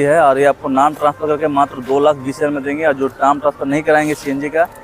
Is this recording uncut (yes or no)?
yes